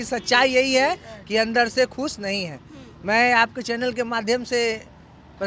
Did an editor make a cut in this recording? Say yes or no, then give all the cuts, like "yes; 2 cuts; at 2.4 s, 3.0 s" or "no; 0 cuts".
no; 0 cuts